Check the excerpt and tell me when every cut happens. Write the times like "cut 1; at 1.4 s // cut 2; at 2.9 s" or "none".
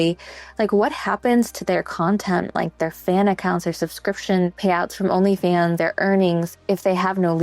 cut 1; at 4.6 s // cut 2; at 5.8 s // cut 3; at 6.6 s